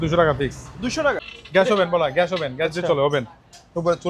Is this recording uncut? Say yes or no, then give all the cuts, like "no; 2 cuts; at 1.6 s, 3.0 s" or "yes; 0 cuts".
no; 1 cut; at 1.2 s